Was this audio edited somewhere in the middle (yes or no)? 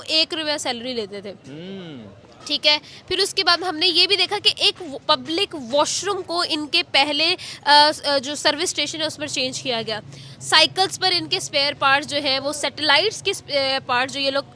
no